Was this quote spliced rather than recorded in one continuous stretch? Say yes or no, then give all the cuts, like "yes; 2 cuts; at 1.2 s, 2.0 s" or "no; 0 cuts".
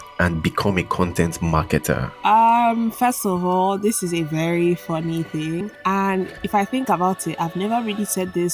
yes; 2 cuts; at 2.1 s, 6.4 s